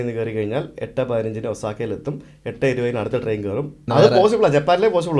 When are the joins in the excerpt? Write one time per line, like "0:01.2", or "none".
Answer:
0:03.8